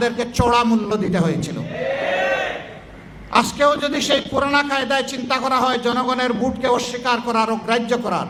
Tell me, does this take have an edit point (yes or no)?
no